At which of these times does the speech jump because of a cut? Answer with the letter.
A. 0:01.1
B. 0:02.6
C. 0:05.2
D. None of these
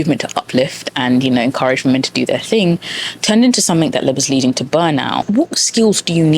C